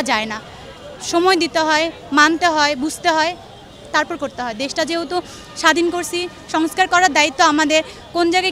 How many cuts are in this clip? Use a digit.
0